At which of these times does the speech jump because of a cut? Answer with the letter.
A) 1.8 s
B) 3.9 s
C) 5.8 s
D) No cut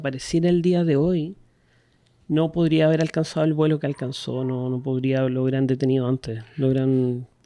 D